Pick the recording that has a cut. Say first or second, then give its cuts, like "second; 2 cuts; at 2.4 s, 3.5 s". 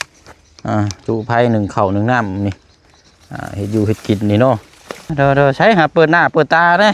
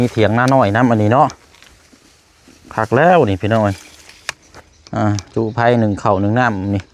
first; 1 cut; at 5.0 s